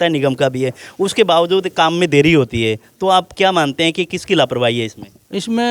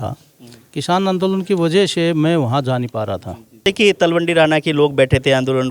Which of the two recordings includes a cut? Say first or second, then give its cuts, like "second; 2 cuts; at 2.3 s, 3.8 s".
second; 1 cut; at 3.7 s